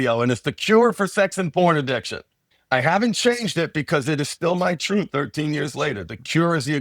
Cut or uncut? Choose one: cut